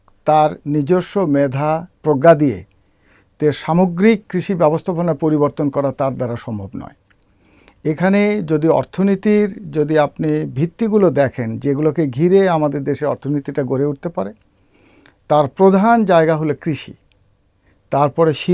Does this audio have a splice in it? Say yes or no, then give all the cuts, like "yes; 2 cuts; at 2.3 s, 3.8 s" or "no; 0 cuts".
no; 0 cuts